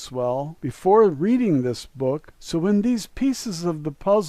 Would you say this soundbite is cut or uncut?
uncut